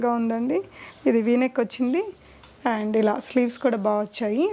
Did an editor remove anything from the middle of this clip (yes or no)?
no